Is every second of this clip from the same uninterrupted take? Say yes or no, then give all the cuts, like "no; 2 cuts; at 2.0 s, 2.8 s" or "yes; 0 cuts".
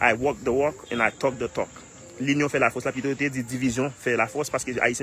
no; 1 cut; at 2.1 s